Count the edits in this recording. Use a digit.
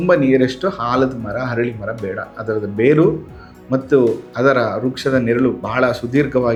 0